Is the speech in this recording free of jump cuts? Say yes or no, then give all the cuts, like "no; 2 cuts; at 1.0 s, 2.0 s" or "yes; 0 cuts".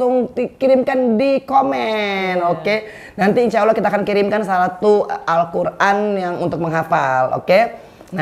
yes; 0 cuts